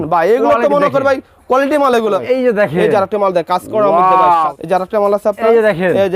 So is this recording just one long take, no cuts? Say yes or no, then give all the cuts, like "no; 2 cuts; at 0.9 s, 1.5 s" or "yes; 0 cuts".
no; 2 cuts; at 2.2 s, 4.6 s